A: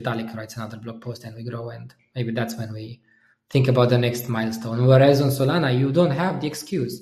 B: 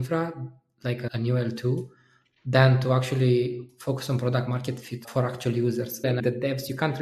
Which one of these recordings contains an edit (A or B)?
B